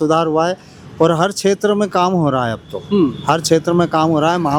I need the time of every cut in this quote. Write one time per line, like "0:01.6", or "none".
none